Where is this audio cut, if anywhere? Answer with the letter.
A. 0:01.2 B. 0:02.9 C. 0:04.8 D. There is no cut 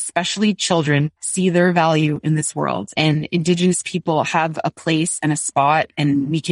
B